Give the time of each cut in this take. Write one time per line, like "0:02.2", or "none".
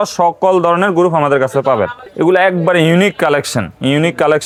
none